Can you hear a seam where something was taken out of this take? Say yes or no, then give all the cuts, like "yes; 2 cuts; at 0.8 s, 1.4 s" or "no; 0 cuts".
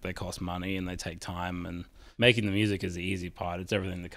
yes; 1 cut; at 2.0 s